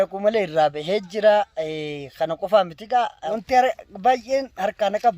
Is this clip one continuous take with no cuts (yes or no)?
no